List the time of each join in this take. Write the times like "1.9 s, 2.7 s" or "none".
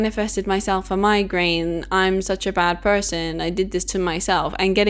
none

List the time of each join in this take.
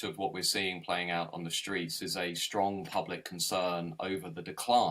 none

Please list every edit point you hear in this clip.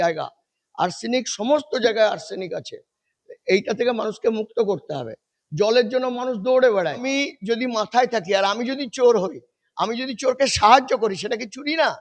7.0 s

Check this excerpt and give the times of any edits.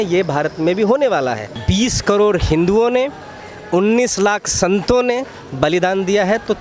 1.5 s

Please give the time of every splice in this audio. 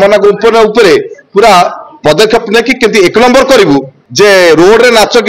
4.0 s

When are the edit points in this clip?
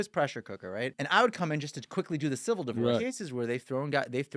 1.0 s, 3.0 s

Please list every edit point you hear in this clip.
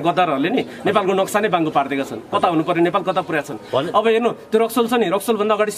none

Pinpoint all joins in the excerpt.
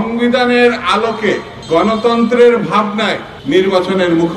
1.5 s, 3.3 s

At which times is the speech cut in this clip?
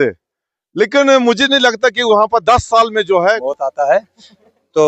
3.4 s

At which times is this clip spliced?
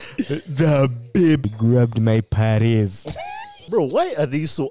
1.4 s, 3.6 s

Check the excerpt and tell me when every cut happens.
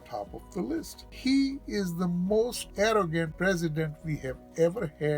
1.0 s, 2.6 s, 3.3 s

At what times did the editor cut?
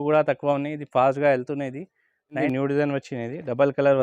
2.4 s

